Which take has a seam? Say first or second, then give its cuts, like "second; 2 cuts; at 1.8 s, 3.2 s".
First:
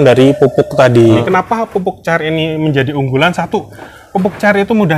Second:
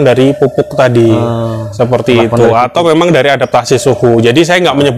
first; 1 cut; at 1.2 s